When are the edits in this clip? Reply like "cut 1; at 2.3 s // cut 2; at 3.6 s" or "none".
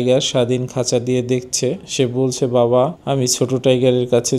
cut 1; at 1.9 s